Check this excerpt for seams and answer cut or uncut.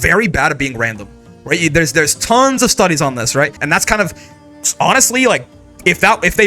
cut